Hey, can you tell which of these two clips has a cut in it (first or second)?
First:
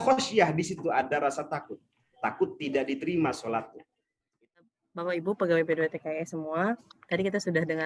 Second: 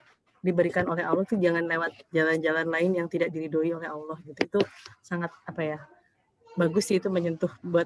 first